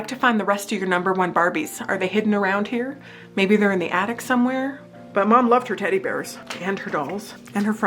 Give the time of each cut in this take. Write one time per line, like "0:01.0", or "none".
0:05.0

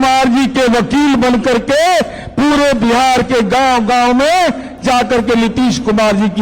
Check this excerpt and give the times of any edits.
none

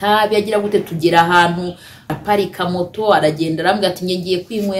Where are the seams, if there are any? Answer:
0:02.2

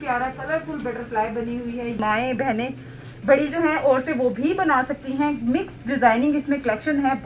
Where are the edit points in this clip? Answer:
0:02.0

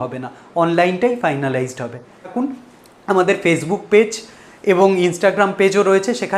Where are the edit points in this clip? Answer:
0:02.3

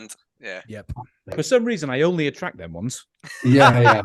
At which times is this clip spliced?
0:01.3

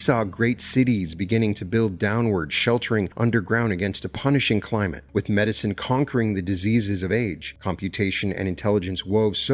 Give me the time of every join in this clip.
0:03.1
0:05.0
0:07.5

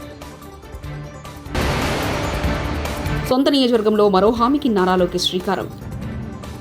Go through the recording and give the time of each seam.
0:01.2
0:03.2

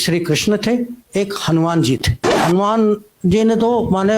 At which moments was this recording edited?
0:02.3

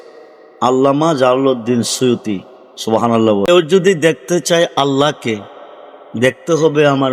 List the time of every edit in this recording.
0:03.5

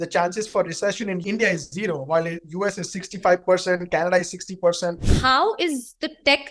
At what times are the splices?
0:01.2
0:05.1

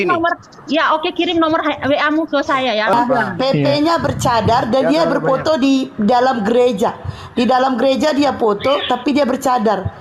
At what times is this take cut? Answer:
0:02.9

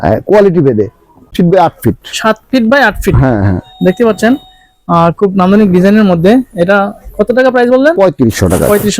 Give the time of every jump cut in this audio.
0:01.3

